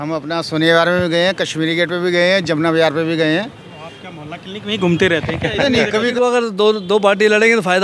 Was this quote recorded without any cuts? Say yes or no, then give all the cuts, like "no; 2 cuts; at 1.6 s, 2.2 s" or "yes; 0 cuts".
no; 1 cut; at 6.1 s